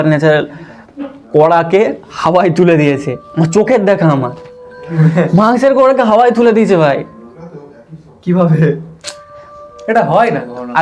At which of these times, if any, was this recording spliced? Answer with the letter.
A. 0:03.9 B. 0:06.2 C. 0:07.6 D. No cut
D